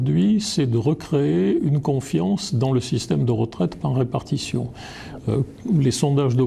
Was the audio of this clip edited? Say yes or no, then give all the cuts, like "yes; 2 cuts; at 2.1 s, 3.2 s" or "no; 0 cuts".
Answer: no; 0 cuts